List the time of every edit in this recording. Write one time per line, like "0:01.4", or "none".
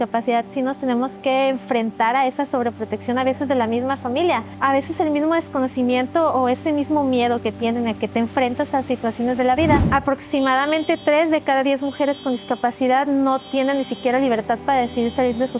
0:04.5
0:09.9